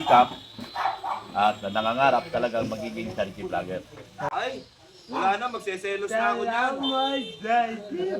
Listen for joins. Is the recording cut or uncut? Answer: cut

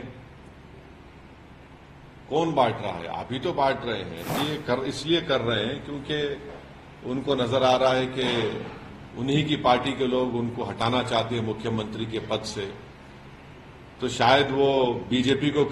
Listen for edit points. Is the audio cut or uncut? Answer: cut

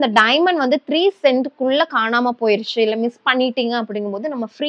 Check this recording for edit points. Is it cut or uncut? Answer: uncut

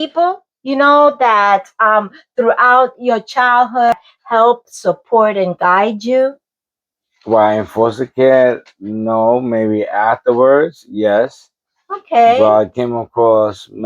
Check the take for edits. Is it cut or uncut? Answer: cut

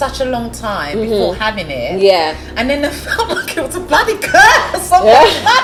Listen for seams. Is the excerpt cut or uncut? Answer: uncut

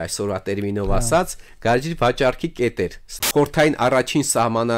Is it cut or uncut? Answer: cut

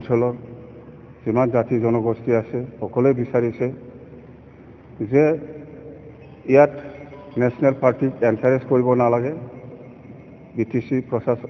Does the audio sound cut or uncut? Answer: uncut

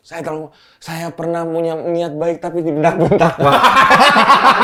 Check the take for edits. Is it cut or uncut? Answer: uncut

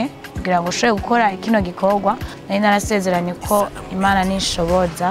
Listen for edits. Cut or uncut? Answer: cut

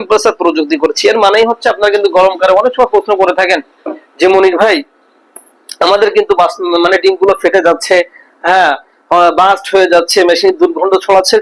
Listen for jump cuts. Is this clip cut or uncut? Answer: uncut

